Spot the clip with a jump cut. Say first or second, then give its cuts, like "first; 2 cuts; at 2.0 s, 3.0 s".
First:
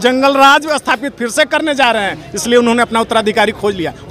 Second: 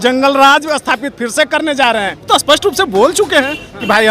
second; 1 cut; at 2.2 s